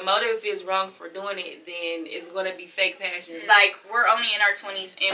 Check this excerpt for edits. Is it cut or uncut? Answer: cut